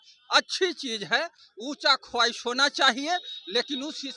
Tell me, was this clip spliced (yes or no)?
no